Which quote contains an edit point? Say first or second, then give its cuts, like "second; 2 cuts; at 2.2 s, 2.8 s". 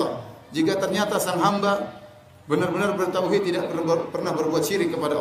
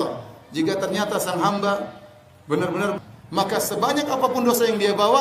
second; 1 cut; at 3.0 s